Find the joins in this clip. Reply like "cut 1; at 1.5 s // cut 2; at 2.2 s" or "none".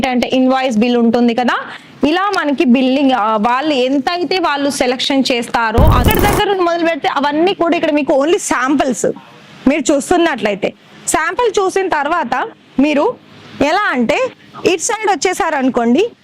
cut 1; at 6.0 s